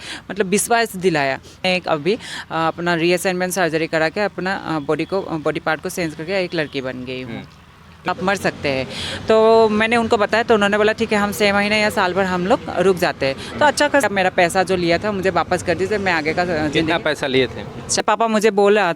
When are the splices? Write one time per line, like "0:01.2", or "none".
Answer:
0:01.6
0:08.1
0:14.0
0:18.0